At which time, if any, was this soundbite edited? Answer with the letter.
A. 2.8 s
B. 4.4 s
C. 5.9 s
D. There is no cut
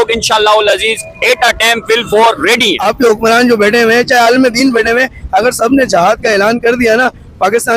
A